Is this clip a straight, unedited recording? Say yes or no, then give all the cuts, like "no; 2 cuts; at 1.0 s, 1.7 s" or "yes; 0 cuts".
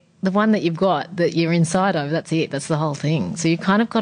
yes; 0 cuts